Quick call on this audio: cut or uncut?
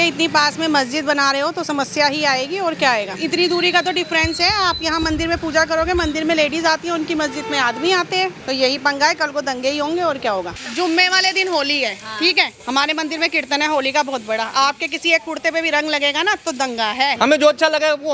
cut